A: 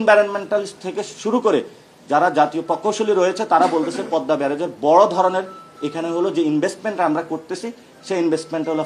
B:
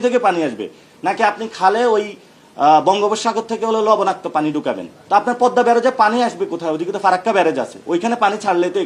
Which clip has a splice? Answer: B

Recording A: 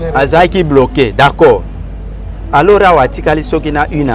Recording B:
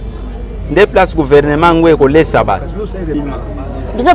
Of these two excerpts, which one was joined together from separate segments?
B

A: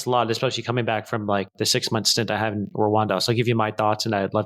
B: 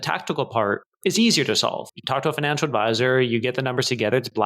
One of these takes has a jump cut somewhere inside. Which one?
B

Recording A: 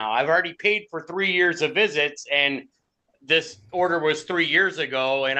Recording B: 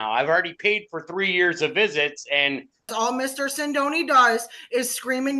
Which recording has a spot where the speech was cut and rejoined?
B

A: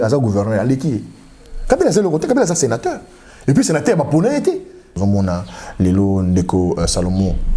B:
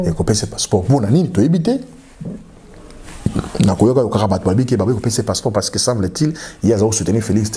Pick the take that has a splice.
A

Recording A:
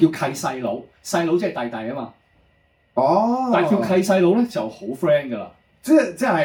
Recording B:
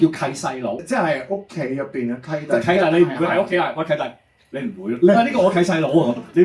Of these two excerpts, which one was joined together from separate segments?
B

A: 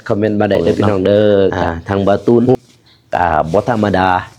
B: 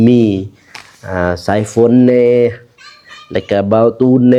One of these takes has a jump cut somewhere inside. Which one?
A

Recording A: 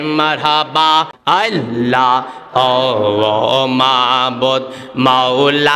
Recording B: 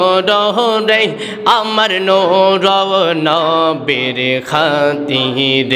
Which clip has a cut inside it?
A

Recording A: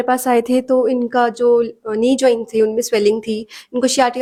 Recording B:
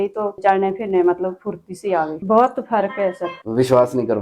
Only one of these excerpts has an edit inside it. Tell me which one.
B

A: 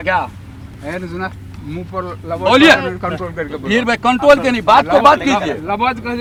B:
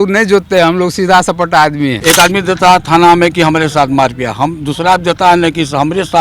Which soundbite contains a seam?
B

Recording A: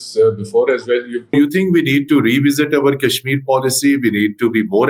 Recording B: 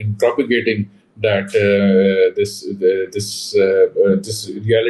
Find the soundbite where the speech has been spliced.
A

